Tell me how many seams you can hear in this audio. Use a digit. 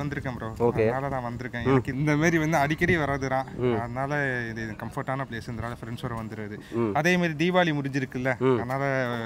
0